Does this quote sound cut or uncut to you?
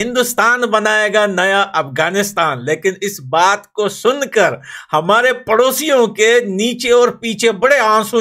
uncut